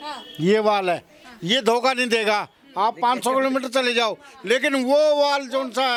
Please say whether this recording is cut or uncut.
uncut